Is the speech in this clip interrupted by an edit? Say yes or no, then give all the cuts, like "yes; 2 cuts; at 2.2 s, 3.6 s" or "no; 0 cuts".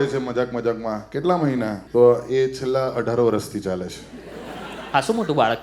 yes; 1 cut; at 1.8 s